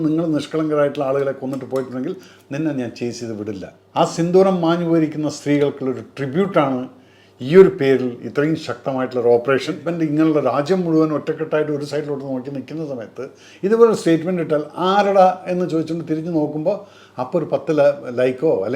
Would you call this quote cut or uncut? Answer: cut